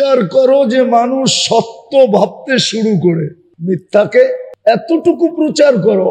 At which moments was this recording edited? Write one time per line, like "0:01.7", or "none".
0:03.4
0:04.5